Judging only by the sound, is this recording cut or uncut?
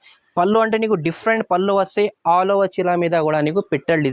uncut